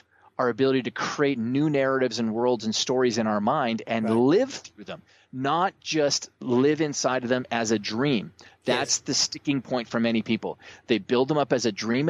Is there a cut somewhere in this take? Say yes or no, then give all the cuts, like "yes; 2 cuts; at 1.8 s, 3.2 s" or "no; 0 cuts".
no; 0 cuts